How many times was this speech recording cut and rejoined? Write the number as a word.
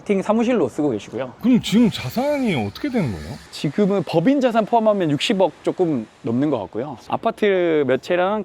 one